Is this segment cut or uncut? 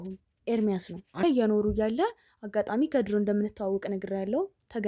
cut